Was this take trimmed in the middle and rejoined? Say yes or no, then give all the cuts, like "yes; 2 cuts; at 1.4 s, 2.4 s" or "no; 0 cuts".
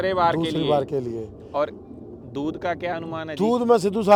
no; 0 cuts